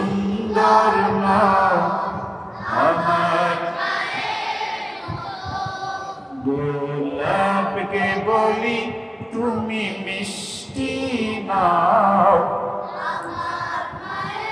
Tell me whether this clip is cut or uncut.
uncut